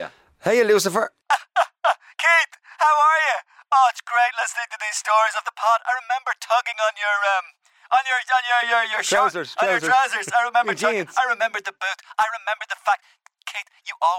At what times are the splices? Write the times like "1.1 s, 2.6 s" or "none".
1.2 s